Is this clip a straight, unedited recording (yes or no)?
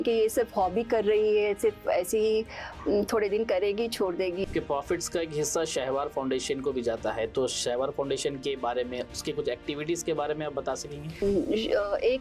no